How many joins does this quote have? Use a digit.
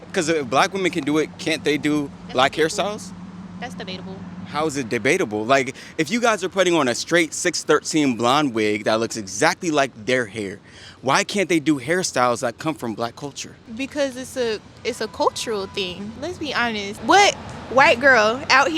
0